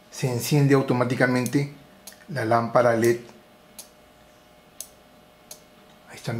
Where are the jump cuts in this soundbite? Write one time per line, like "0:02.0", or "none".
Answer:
none